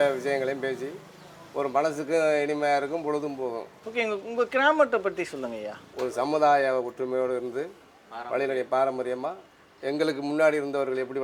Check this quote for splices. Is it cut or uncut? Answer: uncut